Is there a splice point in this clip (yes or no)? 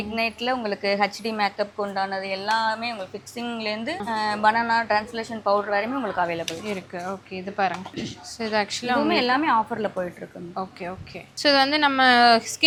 no